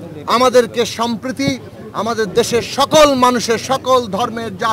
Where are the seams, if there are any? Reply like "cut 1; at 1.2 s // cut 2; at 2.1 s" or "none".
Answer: none